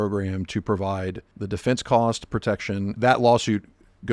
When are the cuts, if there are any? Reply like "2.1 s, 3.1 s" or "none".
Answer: 1.3 s, 2.9 s